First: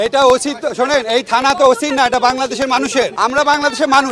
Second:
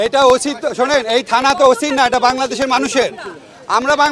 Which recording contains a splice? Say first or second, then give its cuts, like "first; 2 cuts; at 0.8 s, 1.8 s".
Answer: first; 1 cut; at 3.1 s